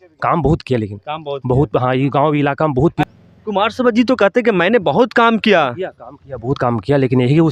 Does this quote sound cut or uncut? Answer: cut